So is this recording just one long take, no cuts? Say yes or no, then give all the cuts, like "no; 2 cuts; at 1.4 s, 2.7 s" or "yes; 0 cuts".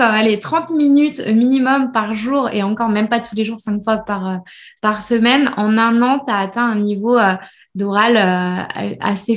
yes; 0 cuts